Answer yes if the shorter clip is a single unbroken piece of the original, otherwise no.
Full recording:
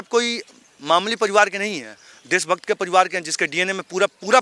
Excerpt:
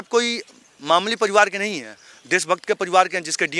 yes